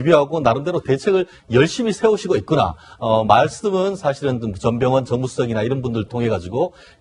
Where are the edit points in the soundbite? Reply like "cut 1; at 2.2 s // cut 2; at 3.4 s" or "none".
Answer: cut 1; at 1.0 s